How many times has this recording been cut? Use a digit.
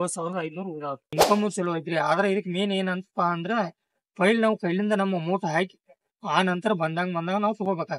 1